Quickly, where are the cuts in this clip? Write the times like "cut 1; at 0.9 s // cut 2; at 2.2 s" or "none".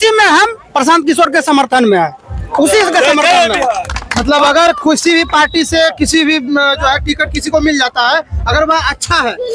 none